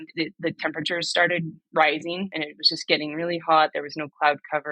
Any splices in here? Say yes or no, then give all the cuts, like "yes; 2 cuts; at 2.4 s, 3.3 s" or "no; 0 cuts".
yes; 1 cut; at 2.3 s